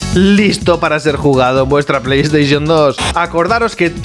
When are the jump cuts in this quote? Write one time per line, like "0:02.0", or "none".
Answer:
0:03.0